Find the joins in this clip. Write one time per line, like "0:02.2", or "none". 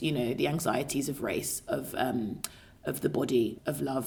none